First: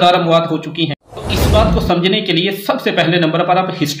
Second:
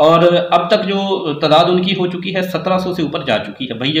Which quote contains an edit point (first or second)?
first